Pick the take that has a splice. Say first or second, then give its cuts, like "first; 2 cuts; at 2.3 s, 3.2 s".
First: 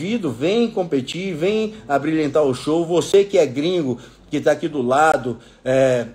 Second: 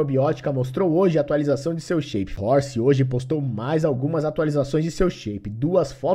second; 1 cut; at 2.3 s